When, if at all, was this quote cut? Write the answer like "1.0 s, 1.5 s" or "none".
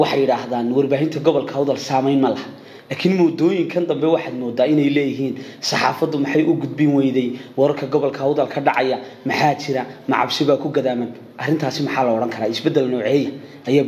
none